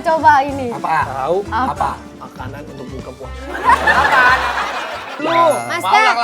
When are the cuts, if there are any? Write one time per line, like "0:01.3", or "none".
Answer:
0:05.2

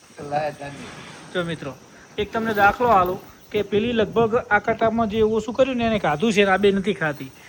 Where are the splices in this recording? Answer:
none

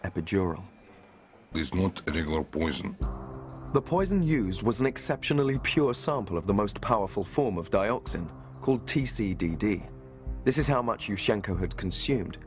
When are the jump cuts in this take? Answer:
none

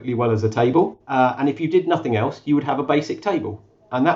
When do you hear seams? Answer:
0:01.0

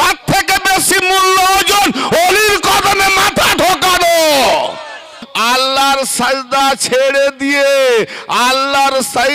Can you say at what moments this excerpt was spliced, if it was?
0:05.2

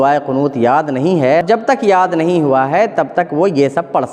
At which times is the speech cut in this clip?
0:01.4

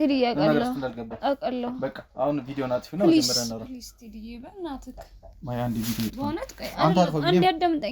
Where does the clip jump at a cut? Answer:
none

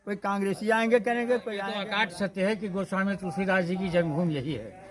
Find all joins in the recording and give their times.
0:01.8

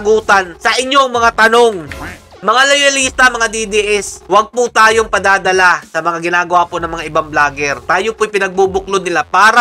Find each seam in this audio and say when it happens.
none

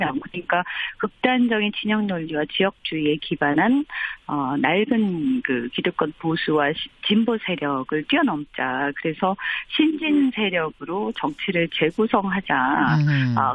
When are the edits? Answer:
0:05.5

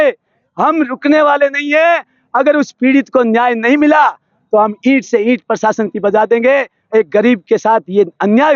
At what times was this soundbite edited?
none

